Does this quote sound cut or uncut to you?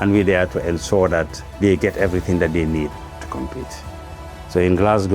cut